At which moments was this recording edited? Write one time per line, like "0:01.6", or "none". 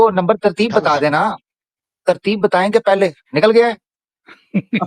none